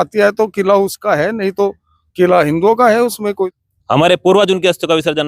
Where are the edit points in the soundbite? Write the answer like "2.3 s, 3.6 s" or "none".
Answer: 3.6 s

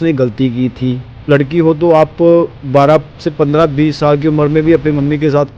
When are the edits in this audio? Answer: 1.3 s

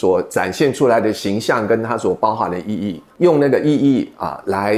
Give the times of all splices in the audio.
3.0 s

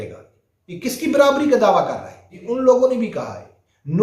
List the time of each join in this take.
2.4 s

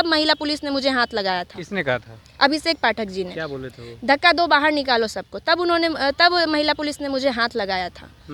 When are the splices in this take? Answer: none

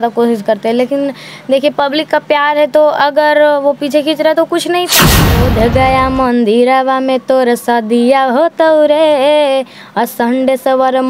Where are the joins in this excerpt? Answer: 5.1 s

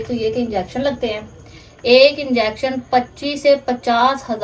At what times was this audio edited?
none

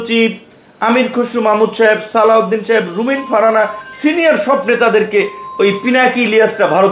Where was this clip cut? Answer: none

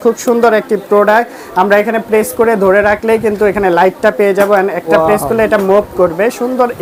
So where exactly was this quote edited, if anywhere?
none

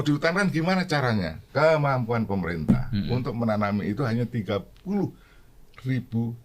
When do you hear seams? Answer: 1.4 s

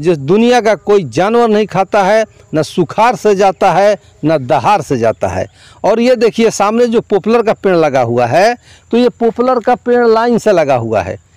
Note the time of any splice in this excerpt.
none

